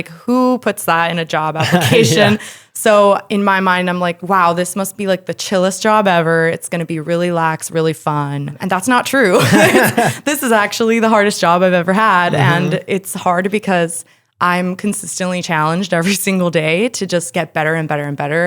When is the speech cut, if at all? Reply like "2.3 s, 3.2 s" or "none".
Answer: 8.5 s